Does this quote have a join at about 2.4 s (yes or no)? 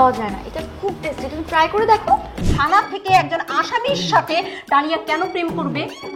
yes